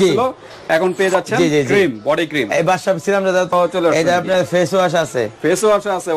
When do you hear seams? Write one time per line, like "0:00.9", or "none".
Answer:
0:03.5